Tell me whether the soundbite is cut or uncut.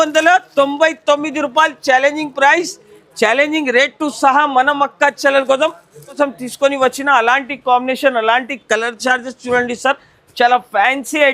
cut